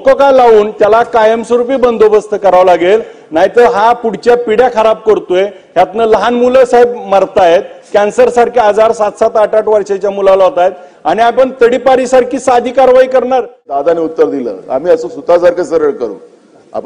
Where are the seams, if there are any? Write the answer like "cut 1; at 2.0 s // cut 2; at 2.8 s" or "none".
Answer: cut 1; at 13.7 s